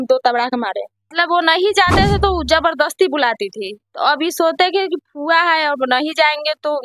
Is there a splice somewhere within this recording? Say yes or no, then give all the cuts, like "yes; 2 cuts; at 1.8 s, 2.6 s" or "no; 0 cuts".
yes; 1 cut; at 1.0 s